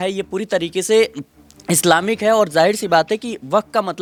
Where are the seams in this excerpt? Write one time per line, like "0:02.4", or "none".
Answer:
none